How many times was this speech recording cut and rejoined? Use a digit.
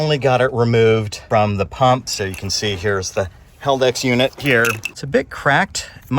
3